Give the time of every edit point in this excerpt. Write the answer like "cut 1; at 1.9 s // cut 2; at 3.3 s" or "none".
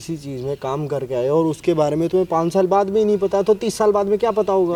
none